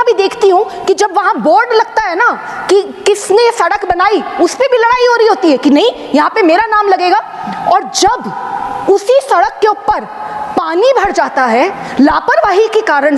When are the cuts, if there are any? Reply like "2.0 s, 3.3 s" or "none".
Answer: none